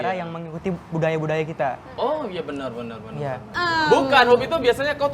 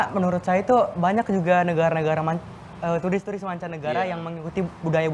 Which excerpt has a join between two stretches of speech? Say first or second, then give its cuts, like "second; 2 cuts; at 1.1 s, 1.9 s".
first; 1 cut; at 3.5 s